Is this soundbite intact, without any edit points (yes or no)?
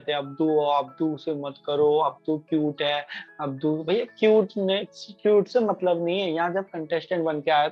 yes